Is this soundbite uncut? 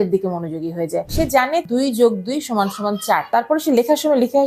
no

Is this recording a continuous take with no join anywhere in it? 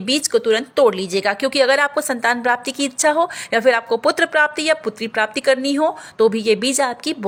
yes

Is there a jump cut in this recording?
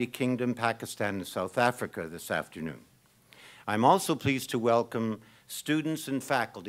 yes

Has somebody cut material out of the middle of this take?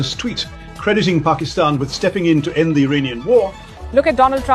yes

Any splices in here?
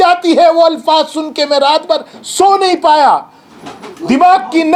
no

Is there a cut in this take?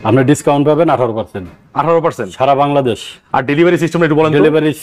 no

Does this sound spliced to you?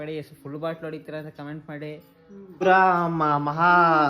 yes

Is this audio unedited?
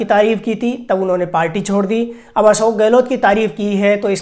yes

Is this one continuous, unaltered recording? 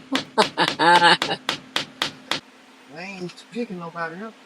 no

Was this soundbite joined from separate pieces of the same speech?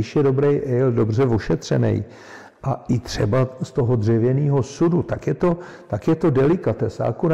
no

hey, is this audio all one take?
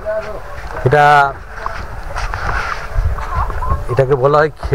yes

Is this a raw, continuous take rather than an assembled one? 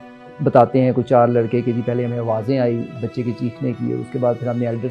yes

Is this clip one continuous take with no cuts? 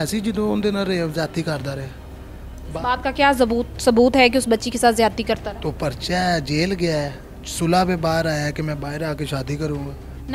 yes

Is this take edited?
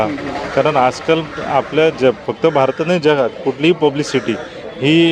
no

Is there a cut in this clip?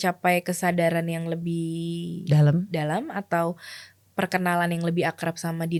no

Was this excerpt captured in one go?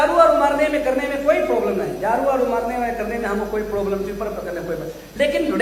yes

